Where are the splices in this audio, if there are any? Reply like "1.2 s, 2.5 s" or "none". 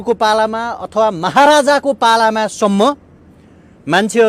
none